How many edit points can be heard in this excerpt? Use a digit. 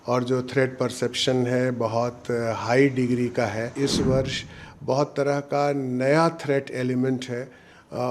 1